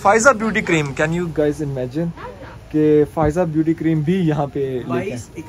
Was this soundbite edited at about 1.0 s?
no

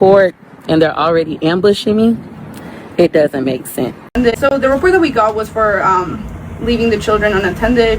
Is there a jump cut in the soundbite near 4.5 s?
yes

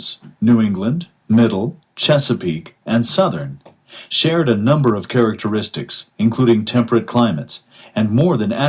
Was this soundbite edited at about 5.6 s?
no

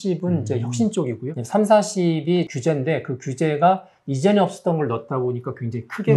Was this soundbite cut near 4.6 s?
no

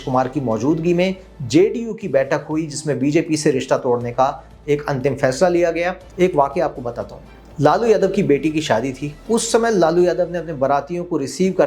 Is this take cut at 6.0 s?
yes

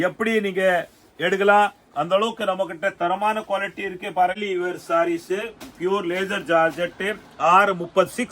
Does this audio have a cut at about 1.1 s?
no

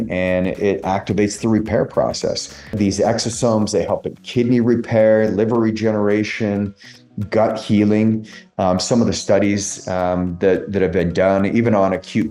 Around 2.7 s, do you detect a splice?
yes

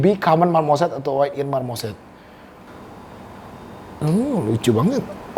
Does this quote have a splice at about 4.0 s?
no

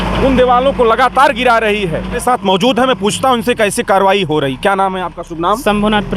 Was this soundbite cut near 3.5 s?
no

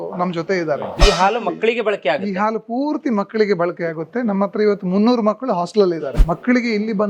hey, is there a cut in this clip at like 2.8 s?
no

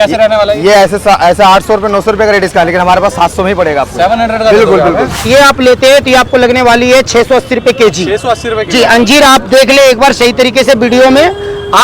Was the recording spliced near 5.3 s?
yes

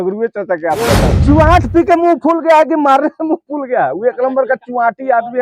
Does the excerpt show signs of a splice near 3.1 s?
no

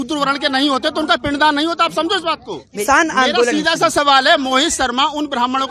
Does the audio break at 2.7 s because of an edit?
yes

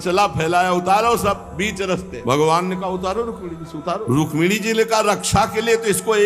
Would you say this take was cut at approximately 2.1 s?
yes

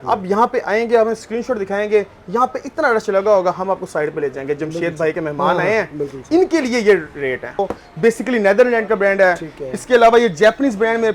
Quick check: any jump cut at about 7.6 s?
yes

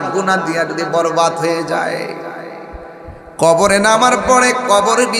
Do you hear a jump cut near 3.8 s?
no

